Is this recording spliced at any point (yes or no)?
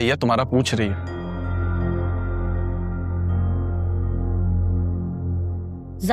no